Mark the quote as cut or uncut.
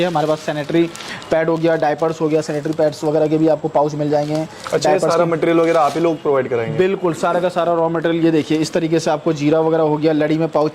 uncut